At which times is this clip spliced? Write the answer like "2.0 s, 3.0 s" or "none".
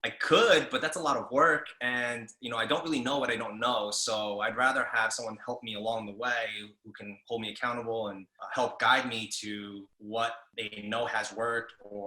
8.3 s, 10.2 s